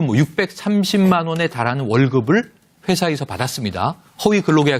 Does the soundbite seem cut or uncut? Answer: uncut